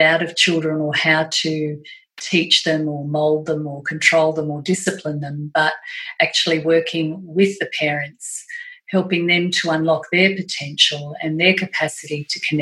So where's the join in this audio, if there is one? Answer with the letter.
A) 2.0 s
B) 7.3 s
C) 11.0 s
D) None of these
D